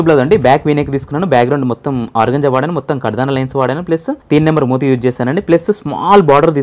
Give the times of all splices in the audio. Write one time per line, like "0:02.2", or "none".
0:04.1